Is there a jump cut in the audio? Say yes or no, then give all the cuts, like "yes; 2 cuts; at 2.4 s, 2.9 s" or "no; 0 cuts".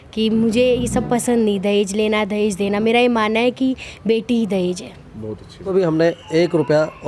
yes; 1 cut; at 5.7 s